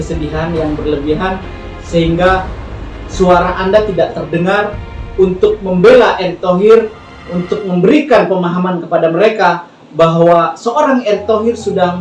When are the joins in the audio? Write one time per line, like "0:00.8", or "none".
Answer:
none

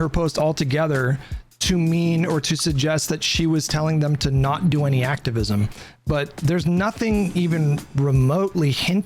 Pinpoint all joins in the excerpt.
none

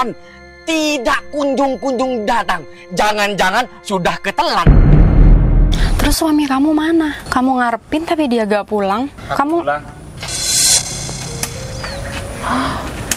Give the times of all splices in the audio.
0:04.6
0:05.7
0:07.2
0:09.2

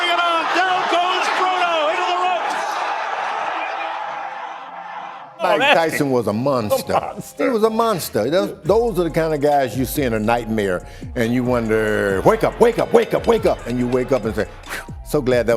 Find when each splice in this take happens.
0:05.2

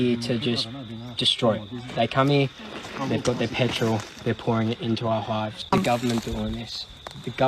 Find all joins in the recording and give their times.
0:05.5

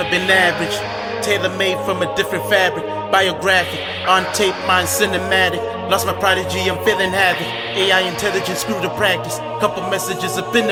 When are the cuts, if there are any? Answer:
none

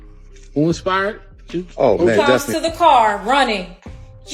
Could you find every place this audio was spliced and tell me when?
0:02.5

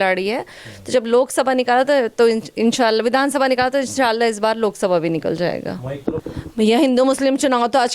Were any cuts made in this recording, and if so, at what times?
0:06.2

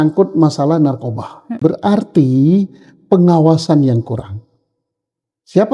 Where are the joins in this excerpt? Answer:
0:01.6

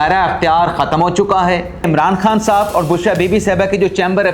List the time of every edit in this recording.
0:01.8

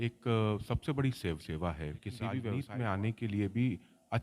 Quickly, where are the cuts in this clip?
0:02.5

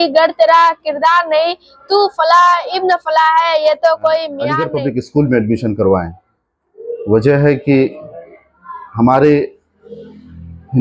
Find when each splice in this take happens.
0:04.6

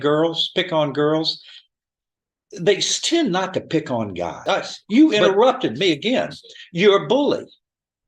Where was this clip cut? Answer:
0:04.4

